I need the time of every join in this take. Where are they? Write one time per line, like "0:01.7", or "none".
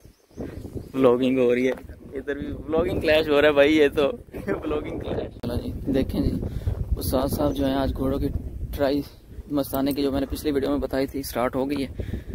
none

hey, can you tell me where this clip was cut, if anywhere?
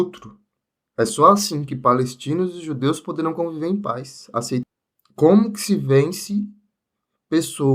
0:04.6

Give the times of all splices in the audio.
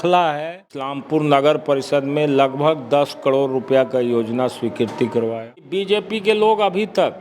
0:00.9
0:05.9

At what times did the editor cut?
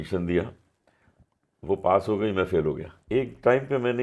0:02.9

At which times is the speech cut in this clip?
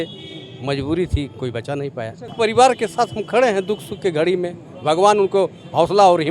0:02.3

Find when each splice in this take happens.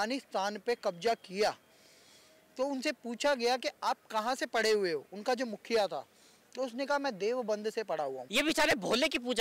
0:08.2

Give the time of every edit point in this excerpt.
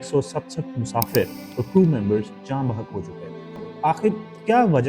0:03.7

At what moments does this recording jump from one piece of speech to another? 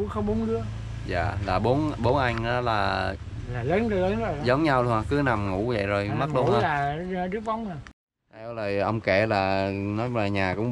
0:08.1

